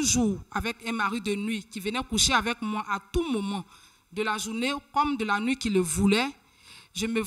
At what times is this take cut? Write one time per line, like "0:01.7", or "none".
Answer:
none